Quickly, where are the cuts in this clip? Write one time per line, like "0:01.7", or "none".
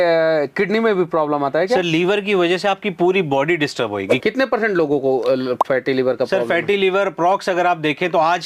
0:04.1